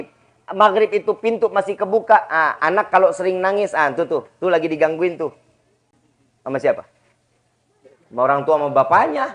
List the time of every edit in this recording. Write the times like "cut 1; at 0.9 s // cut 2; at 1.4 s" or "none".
none